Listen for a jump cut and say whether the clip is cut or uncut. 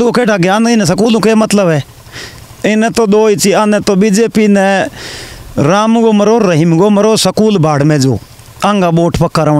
uncut